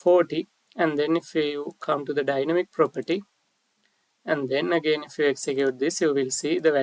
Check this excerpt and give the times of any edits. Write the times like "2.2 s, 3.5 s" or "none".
none